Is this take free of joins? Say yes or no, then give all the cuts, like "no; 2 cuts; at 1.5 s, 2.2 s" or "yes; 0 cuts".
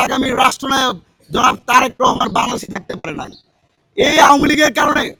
yes; 0 cuts